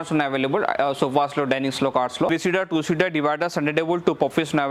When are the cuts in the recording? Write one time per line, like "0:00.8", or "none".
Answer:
0:02.3